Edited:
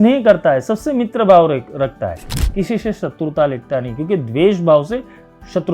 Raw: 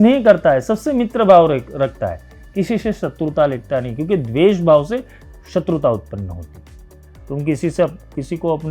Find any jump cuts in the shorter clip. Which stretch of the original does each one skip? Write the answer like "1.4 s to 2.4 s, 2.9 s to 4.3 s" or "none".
none